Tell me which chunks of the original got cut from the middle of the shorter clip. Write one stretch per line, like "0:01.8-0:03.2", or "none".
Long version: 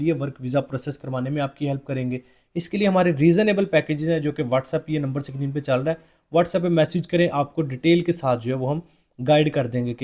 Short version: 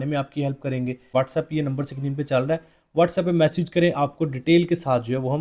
0:02.3-0:04.4